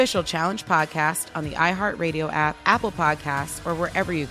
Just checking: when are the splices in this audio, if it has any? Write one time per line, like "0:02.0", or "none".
none